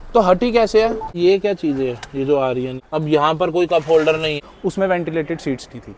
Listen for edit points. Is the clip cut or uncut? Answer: cut